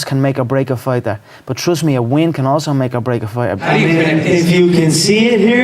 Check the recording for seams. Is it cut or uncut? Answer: cut